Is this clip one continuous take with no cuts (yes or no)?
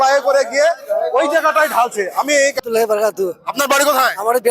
no